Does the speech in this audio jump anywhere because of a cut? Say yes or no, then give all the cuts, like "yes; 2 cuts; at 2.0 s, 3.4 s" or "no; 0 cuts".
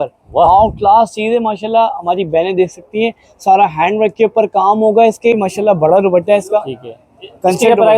yes; 1 cut; at 5.4 s